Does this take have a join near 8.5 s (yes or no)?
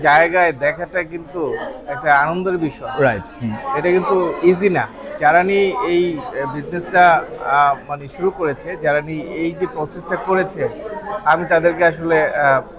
no